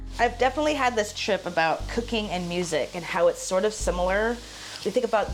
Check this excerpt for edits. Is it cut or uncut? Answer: uncut